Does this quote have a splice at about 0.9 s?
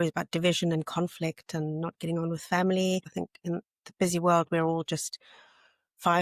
no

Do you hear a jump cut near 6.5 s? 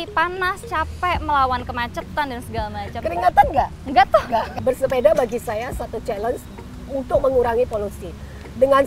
no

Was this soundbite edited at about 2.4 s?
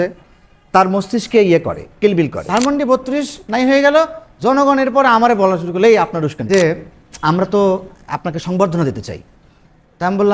yes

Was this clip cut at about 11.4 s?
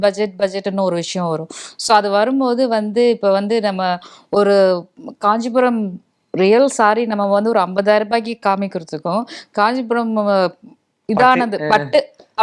no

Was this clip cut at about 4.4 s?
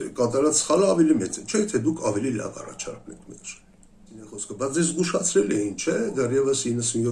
yes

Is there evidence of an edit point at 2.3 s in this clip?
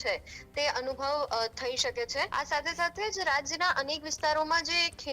yes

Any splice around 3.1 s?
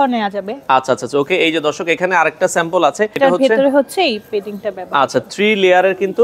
yes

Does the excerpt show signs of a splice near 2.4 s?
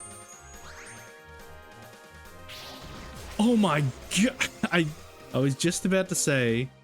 yes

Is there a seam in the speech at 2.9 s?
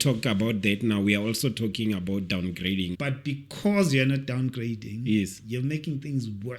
yes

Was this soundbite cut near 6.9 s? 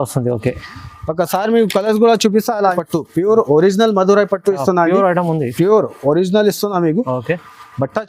no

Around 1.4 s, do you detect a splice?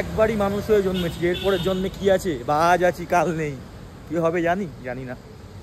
no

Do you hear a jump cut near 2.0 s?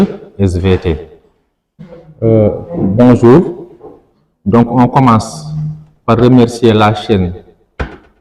yes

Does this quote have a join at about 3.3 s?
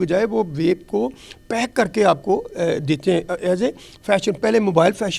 no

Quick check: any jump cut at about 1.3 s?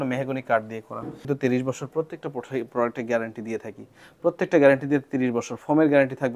yes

